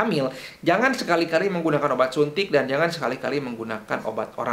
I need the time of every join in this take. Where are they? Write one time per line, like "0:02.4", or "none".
none